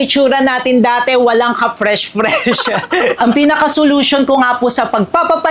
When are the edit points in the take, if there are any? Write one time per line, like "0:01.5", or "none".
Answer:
0:03.2

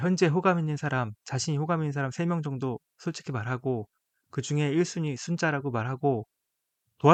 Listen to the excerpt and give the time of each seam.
none

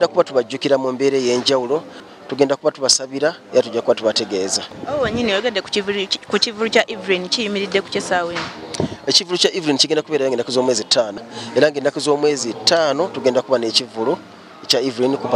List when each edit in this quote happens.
0:02.0
0:04.7
0:11.2

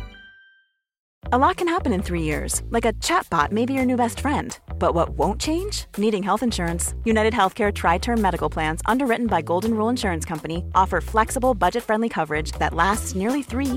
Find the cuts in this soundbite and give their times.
0:01.1

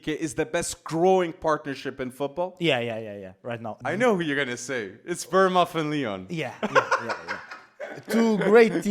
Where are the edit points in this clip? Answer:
0:03.7

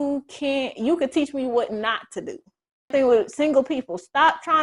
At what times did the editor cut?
0:02.9

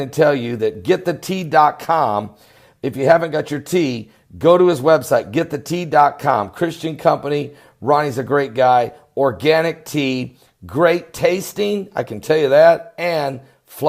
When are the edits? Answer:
0:08.5

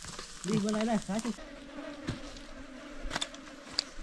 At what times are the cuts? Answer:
0:01.3

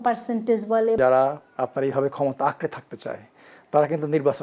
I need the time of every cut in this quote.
0:01.0

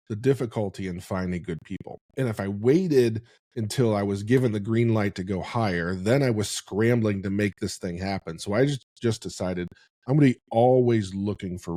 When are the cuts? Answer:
none

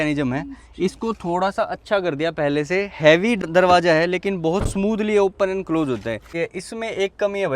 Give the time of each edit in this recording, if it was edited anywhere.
0:03.4
0:06.3

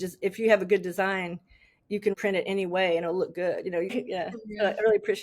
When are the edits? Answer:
0:02.1
0:03.9

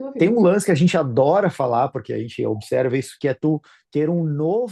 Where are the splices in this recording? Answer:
none

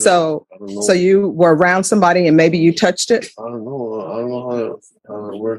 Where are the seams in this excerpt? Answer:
none

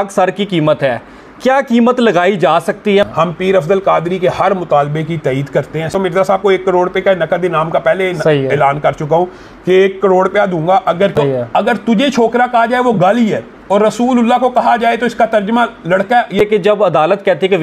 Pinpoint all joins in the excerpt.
0:03.1
0:05.9
0:11.1
0:16.4

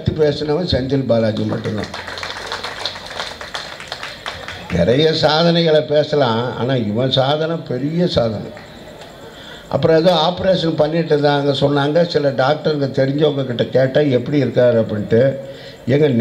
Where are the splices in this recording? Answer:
none

